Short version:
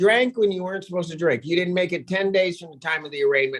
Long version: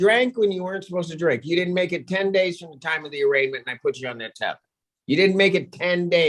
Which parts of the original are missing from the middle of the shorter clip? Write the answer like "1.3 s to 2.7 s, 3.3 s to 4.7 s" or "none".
none